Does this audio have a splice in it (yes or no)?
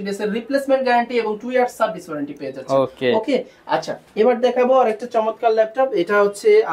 no